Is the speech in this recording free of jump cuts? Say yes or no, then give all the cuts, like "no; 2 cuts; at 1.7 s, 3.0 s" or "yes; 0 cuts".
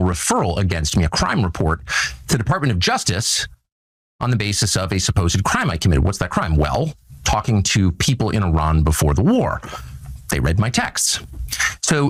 yes; 0 cuts